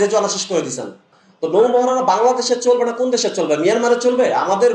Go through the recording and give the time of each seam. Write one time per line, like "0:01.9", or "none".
0:01.6